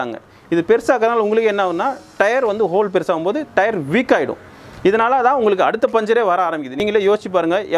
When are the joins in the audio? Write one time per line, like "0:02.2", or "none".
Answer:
0:06.7